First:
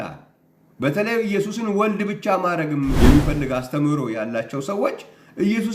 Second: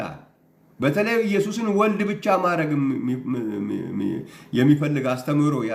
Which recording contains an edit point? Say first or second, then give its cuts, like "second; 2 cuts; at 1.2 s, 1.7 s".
first; 1 cut; at 3.0 s